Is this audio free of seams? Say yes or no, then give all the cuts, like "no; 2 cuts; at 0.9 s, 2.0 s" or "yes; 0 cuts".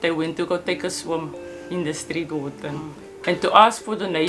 no; 1 cut; at 3.2 s